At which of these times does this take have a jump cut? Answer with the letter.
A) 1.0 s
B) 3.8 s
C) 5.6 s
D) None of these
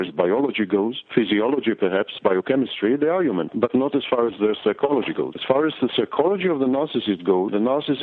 D